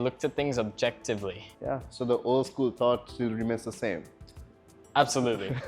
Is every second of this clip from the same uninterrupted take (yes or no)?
no